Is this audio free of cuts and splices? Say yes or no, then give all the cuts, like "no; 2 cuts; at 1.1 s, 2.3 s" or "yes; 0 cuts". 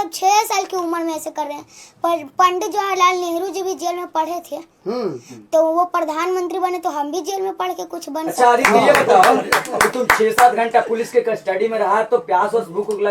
yes; 0 cuts